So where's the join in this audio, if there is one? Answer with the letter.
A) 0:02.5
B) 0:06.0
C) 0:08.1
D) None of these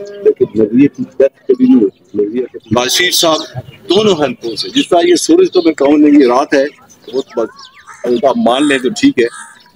A